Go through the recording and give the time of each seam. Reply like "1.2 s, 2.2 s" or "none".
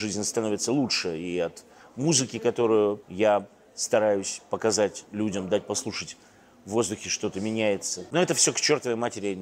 3.1 s, 5.0 s, 8.1 s